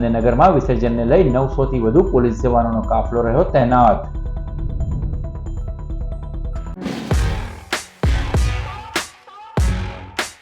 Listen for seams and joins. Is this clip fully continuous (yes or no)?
no